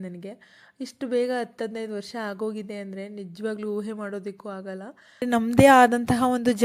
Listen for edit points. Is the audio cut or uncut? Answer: cut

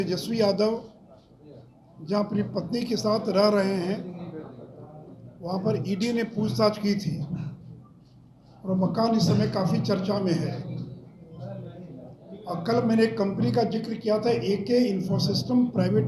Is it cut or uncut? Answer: uncut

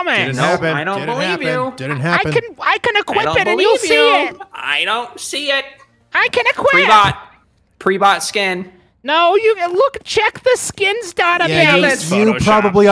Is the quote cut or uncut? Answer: uncut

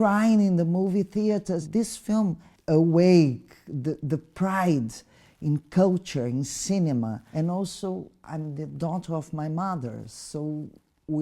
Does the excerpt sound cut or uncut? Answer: cut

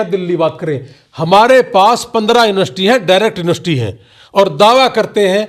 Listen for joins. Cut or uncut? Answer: uncut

